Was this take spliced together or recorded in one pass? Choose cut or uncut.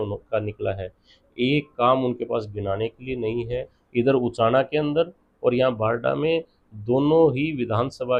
cut